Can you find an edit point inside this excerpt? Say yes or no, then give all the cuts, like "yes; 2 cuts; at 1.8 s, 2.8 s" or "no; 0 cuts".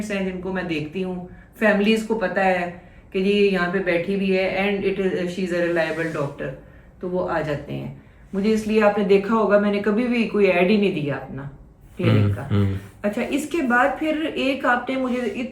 no; 0 cuts